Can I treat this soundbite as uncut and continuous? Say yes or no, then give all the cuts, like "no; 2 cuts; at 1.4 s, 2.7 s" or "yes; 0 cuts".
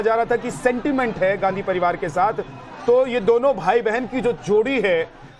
yes; 0 cuts